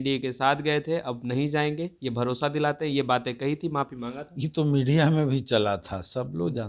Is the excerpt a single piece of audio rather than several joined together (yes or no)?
yes